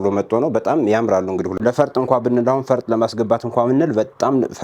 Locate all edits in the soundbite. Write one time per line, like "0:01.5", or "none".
0:01.6